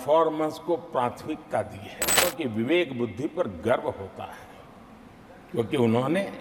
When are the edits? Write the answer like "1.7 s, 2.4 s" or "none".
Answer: 2.2 s

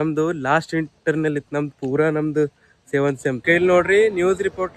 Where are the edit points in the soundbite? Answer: 3.4 s

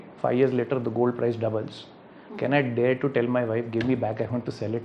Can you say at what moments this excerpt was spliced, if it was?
none

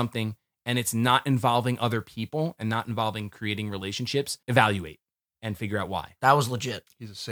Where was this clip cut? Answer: 4.4 s, 6.1 s

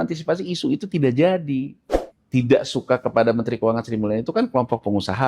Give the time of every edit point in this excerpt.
1.8 s

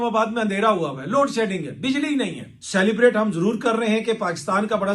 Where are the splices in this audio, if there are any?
2.5 s

